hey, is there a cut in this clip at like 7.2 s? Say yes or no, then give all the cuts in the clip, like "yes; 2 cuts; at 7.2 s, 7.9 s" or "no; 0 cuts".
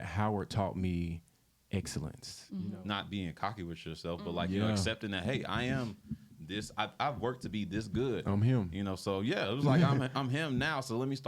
no; 1 cut; at 2.7 s